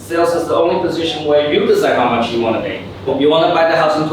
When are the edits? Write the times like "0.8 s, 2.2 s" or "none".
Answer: 3.0 s